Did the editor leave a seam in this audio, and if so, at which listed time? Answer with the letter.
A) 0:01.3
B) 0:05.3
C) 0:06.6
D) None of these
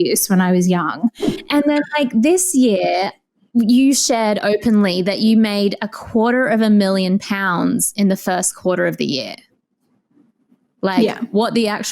A